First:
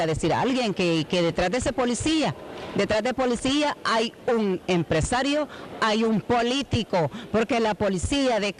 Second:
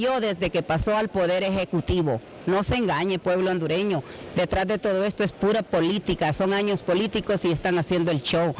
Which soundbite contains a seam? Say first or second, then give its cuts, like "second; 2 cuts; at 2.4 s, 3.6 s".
second; 1 cut; at 1.0 s